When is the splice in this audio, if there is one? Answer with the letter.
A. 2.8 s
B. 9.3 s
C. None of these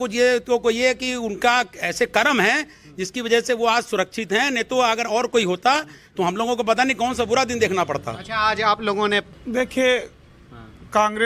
B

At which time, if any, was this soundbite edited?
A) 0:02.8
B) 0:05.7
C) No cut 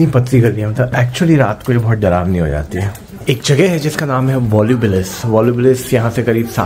C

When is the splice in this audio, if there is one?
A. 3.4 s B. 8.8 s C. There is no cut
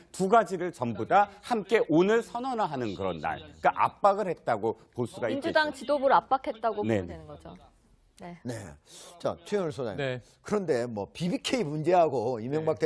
B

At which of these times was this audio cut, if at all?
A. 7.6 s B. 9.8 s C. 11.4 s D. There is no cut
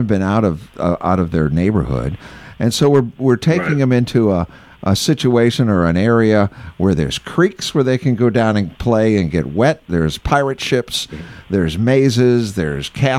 D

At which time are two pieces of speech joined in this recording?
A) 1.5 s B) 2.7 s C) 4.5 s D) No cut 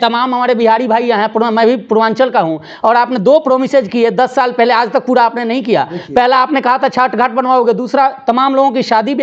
D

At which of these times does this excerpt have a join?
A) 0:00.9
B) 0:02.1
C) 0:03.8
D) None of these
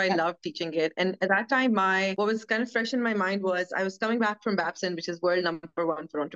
B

